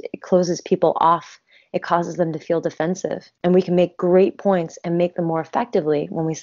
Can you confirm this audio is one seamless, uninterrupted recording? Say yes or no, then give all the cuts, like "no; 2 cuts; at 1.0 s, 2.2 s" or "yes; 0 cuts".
no; 1 cut; at 3.3 s